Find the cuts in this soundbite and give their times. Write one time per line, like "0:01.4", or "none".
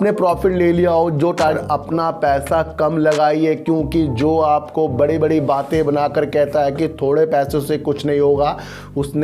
0:01.4